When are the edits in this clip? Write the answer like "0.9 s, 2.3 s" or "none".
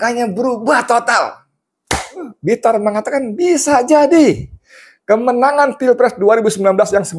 2.3 s